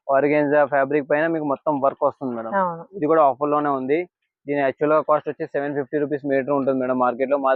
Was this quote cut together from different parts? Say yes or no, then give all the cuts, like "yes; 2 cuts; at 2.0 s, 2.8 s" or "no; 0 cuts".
no; 0 cuts